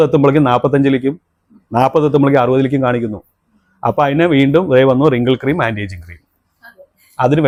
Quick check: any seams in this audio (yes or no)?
no